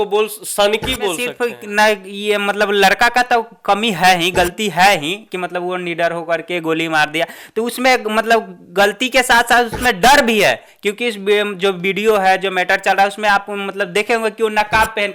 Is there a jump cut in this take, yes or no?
yes